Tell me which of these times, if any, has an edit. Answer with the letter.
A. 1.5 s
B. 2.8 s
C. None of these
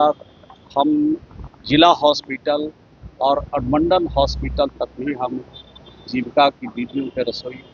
C